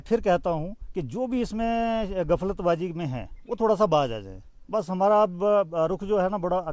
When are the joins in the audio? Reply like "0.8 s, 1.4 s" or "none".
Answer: none

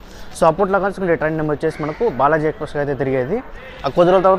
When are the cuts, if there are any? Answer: none

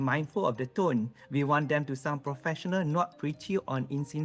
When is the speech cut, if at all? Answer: none

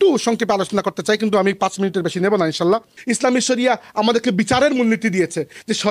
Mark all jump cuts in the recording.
3.0 s

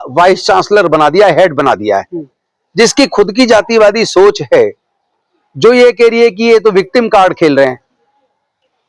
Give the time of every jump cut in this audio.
none

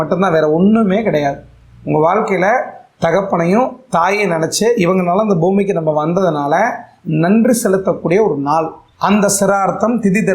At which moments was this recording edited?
8.8 s

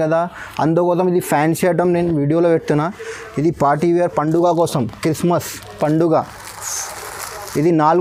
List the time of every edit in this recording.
none

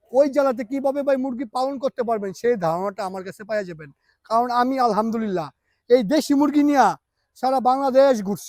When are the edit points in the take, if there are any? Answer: none

